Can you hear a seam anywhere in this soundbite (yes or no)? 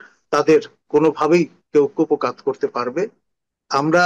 no